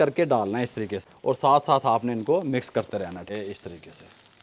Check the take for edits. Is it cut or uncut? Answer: cut